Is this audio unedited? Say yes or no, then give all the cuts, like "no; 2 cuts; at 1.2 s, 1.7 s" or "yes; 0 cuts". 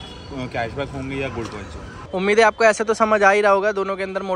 no; 1 cut; at 1.9 s